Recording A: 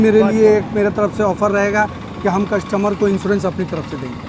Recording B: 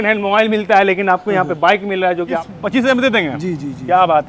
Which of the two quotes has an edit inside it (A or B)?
B